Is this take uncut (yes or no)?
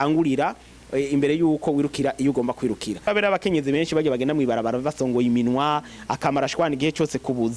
no